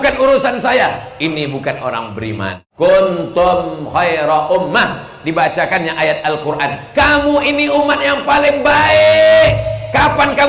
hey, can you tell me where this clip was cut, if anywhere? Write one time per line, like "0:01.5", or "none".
0:02.6